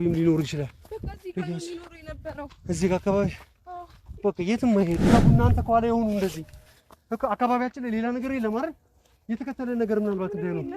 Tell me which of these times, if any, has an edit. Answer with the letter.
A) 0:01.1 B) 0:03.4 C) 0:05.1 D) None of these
C